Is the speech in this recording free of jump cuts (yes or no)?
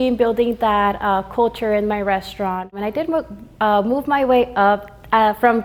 yes